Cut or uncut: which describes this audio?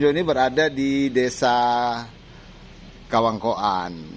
uncut